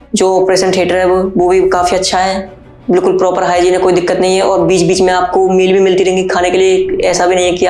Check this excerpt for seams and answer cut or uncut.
uncut